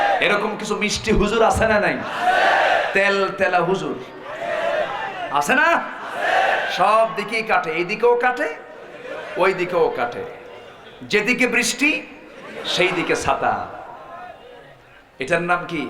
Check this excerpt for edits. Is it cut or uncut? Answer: uncut